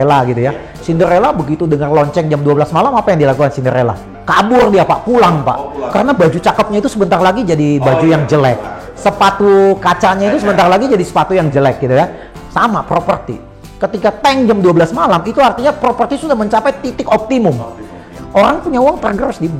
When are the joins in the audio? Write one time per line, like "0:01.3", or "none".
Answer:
0:18.1